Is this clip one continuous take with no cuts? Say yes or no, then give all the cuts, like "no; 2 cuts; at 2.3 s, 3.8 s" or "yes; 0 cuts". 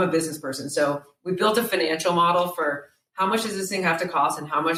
yes; 0 cuts